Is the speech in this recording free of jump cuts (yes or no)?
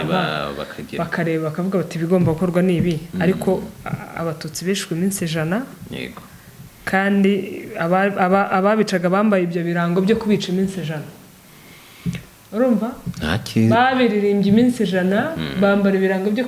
yes